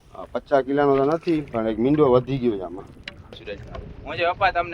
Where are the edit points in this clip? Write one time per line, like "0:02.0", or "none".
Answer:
0:03.4